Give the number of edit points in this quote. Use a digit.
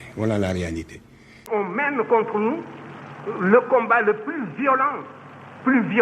1